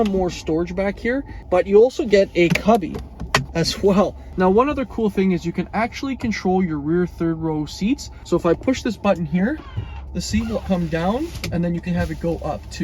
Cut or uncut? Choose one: cut